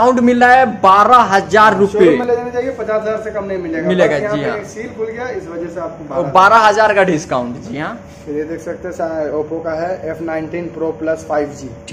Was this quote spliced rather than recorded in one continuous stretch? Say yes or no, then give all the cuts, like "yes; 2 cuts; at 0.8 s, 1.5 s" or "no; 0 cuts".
no; 0 cuts